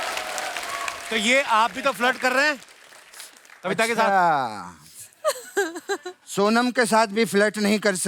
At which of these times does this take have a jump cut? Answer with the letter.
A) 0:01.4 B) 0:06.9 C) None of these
C